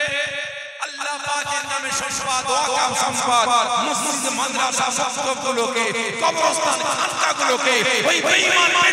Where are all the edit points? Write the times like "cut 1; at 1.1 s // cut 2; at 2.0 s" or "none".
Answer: none